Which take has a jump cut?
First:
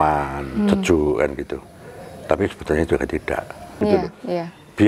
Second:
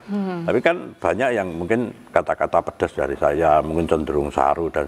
first; 1 cut; at 3.7 s

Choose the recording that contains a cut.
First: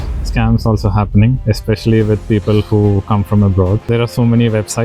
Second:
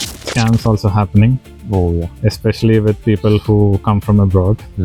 first; 2 cuts; at 1.4 s, 3.9 s

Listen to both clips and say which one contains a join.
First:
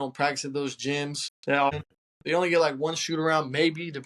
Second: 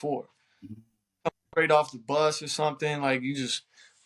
first; 1 cut; at 1.7 s

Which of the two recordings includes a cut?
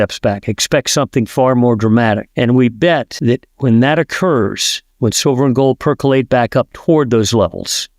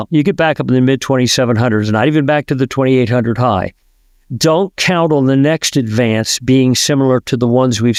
first; 2 cuts; at 2.3 s, 3.1 s

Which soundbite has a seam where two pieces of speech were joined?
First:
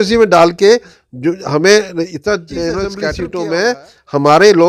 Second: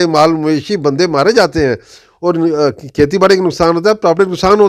first; 1 cut; at 3.2 s

